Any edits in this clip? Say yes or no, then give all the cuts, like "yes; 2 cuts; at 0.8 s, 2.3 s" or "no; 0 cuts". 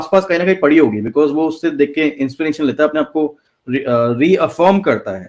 no; 0 cuts